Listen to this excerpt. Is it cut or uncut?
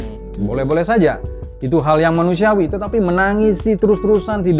uncut